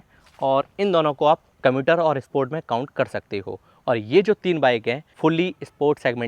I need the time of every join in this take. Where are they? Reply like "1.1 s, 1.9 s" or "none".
1.5 s, 5.1 s

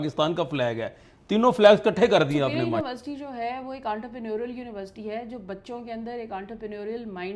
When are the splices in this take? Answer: 2.8 s

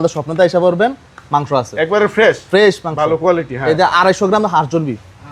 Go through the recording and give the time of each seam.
none

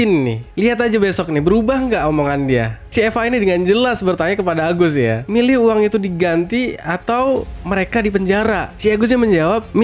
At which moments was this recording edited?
none

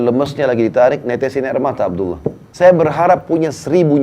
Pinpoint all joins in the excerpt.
2.4 s

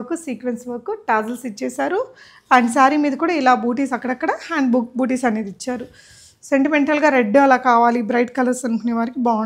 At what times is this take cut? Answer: none

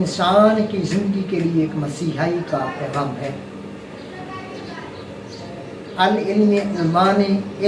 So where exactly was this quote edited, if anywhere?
none

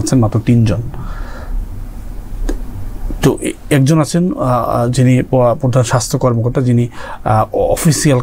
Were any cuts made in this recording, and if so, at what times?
none

